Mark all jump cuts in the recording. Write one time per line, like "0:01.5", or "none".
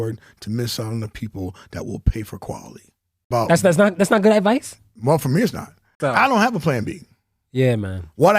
0:03.2
0:05.9